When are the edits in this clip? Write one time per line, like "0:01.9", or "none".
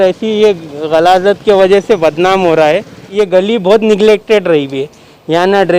0:03.0